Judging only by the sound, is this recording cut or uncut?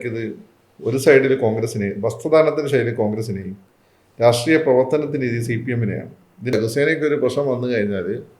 cut